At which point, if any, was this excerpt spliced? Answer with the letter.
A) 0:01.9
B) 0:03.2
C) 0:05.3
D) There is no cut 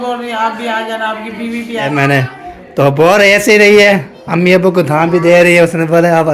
A